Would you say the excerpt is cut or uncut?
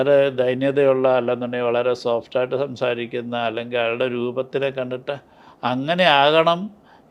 uncut